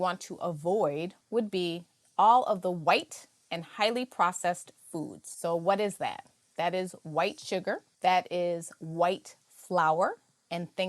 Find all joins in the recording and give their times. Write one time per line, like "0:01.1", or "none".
0:01.2